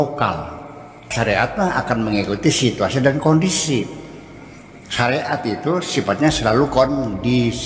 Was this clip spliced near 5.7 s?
no; 1 cut; at 1.1 s

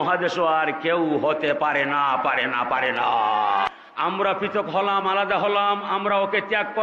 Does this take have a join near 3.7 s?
yes; 1 cut; at 3.7 s

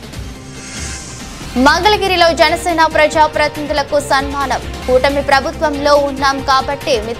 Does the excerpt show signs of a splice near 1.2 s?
yes; 1 cut; at 1.2 s

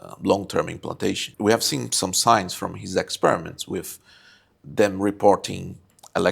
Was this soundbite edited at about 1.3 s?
yes; 1 cut; at 1.3 s

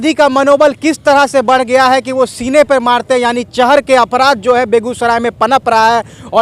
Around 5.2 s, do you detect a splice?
no; 0 cuts

